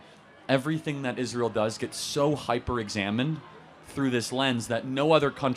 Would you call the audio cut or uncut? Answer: uncut